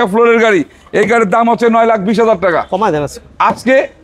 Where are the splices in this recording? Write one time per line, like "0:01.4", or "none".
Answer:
none